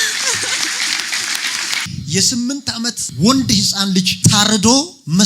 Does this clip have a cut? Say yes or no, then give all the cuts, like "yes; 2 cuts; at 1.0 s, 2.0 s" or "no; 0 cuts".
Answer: yes; 1 cut; at 1.8 s